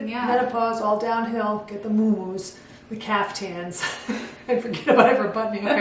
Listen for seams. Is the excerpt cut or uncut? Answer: uncut